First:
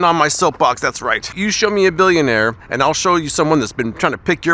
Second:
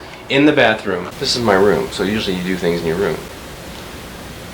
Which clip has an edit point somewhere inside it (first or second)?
second